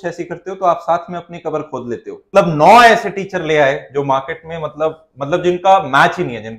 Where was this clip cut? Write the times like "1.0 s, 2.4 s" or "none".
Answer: 2.2 s